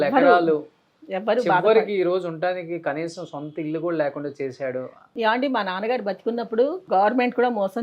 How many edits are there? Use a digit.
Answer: 2